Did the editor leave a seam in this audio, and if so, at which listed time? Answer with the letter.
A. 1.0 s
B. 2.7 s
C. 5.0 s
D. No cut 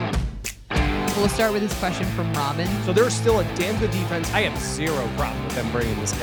D